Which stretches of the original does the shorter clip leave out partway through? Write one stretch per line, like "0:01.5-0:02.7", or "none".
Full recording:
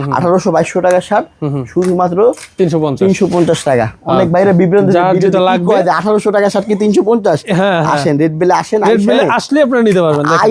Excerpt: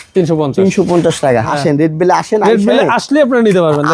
0:03.9-0:07.9